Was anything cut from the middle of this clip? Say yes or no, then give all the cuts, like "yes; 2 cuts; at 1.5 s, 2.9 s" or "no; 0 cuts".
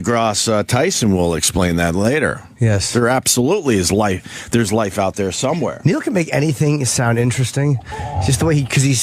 yes; 1 cut; at 2.9 s